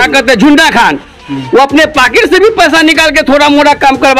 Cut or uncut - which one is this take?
uncut